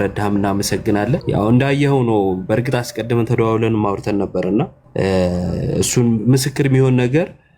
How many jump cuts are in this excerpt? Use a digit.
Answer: 2